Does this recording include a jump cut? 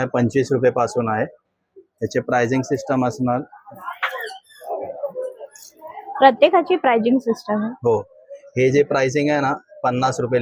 no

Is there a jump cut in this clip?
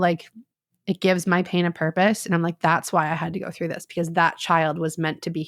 no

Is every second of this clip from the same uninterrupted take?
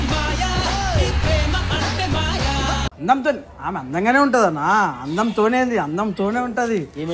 yes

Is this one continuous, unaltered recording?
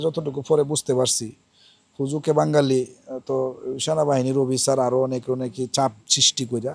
yes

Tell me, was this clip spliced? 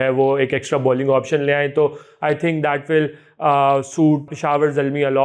yes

